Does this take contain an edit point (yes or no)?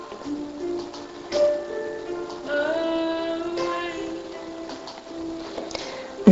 no